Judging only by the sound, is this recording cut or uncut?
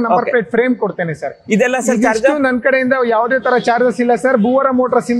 uncut